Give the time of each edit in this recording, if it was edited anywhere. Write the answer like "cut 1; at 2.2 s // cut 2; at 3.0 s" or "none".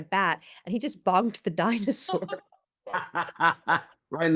none